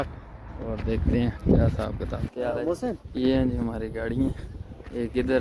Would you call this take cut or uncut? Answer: cut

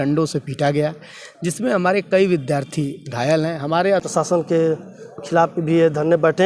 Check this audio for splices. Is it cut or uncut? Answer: cut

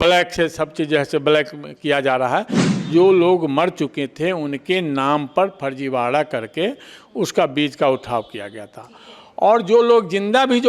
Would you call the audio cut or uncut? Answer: cut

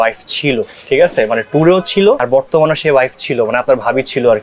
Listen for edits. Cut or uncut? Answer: uncut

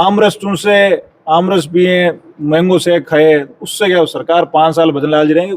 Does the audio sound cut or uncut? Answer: uncut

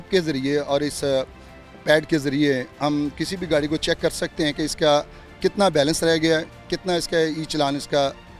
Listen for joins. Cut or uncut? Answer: uncut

